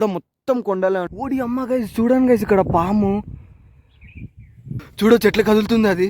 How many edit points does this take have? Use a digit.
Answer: 2